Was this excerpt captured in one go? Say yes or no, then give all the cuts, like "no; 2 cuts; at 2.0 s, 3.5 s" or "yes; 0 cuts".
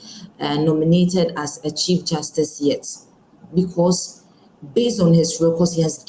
yes; 0 cuts